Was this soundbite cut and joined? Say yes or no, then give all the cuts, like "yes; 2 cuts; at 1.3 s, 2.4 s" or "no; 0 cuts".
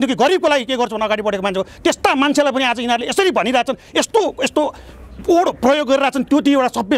no; 0 cuts